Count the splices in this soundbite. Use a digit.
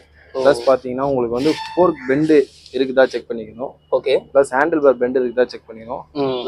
0